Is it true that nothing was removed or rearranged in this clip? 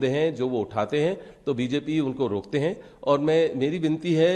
yes; 0 cuts

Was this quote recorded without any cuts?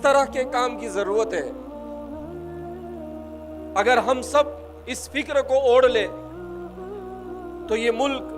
no; 2 cuts; at 1.5 s, 3.7 s

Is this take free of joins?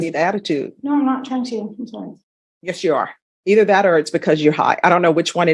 yes; 0 cuts

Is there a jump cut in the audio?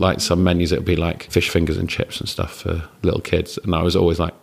yes; 1 cut; at 1.3 s

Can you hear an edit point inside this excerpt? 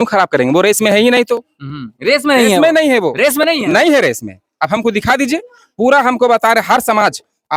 no; 0 cuts

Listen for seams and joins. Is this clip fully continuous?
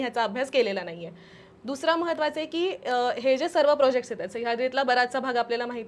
yes; 0 cuts

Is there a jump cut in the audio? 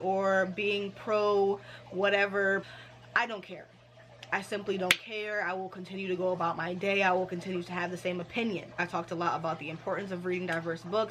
yes; 2 cuts; at 2.7 s, 8.8 s

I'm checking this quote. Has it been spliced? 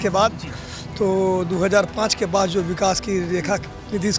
no; 0 cuts

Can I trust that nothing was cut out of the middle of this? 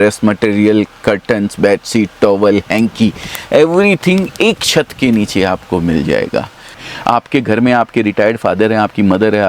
no; 1 cut; at 6.8 s

